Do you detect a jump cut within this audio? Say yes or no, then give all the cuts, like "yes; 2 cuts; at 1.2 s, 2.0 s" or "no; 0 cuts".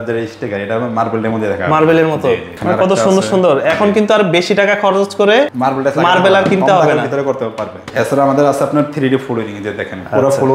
yes; 3 cuts; at 2.5 s, 5.5 s, 7.8 s